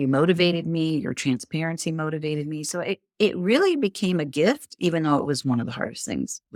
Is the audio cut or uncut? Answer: uncut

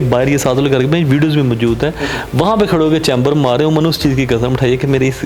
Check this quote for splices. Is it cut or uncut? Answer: uncut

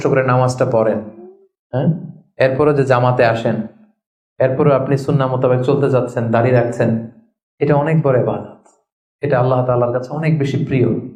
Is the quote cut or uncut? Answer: uncut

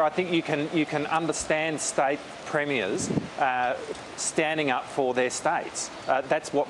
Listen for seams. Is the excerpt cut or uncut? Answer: uncut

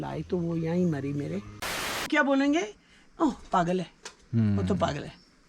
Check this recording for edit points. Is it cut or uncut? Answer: cut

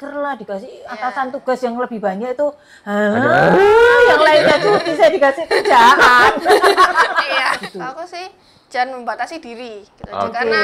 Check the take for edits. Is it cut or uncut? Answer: cut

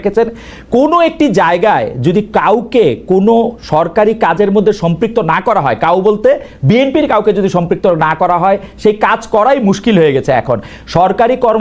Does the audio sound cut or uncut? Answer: uncut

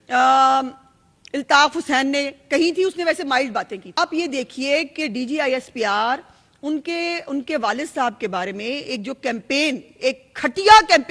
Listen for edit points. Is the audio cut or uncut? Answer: cut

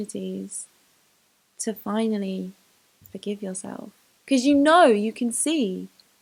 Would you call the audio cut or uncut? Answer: uncut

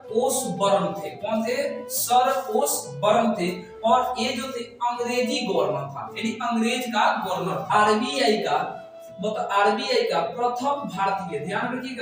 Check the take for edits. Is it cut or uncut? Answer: cut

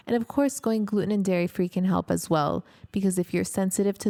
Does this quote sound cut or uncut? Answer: uncut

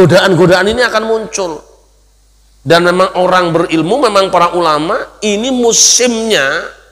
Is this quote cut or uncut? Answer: uncut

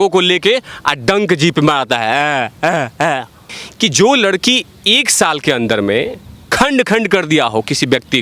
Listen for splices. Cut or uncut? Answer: cut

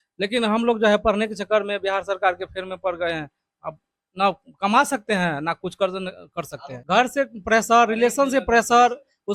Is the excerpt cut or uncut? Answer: cut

